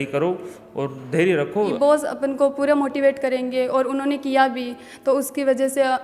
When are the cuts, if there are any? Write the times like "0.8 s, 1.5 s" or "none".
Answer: 1.7 s

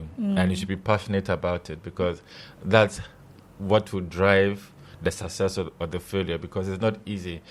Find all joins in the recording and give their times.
none

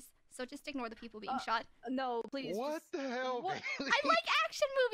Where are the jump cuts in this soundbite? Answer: none

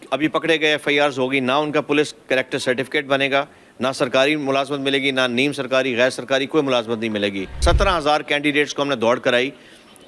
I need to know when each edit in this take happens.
7.6 s

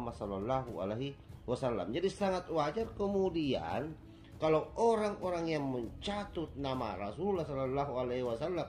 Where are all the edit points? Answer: none

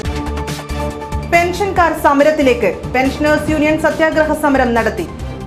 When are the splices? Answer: 1.0 s

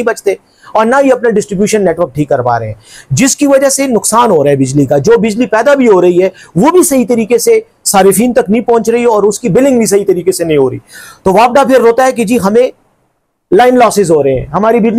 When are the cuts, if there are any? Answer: none

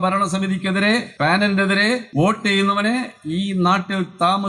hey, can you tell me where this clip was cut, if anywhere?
1.1 s, 2.1 s

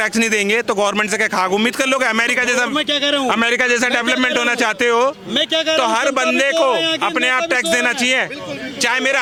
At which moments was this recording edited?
none

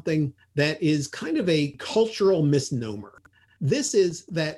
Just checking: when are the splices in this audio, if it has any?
1.7 s, 3.4 s

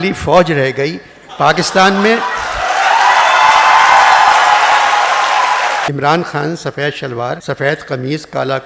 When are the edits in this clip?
5.9 s, 7.4 s

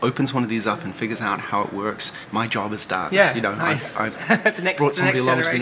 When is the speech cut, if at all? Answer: none

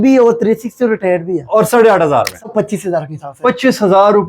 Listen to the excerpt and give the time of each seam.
2.4 s

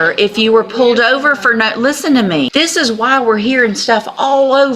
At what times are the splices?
2.5 s

